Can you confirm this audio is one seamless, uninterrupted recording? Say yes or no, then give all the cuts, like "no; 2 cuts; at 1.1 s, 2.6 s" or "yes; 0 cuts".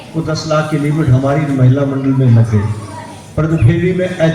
yes; 0 cuts